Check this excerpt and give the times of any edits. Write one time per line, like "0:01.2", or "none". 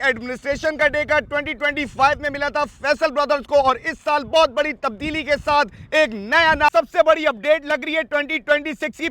0:06.7